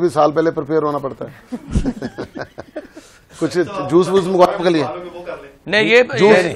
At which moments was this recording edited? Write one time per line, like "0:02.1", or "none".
none